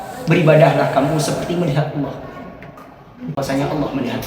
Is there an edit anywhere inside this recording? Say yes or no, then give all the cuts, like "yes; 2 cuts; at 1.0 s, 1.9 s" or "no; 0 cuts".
yes; 1 cut; at 3.4 s